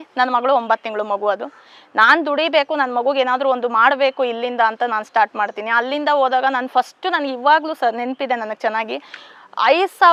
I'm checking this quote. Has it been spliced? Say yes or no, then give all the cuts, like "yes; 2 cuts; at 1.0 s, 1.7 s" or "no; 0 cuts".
no; 0 cuts